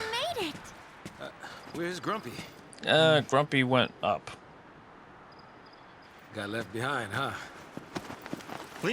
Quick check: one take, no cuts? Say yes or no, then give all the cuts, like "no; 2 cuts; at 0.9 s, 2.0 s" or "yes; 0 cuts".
no; 1 cut; at 6.1 s